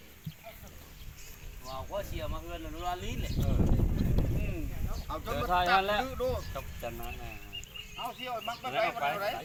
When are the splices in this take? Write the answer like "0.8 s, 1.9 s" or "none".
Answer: none